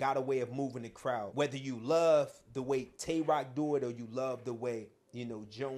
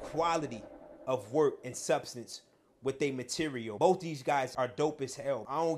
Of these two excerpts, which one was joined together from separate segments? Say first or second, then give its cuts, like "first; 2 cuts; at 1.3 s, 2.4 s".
second; 2 cuts; at 3.7 s, 4.5 s